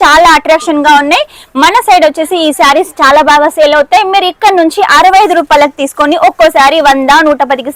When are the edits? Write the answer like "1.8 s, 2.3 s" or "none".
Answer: none